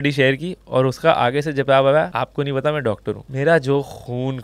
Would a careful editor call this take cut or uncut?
cut